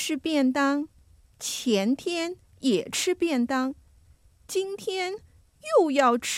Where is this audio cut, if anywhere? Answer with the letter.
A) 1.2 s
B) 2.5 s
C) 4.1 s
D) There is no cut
D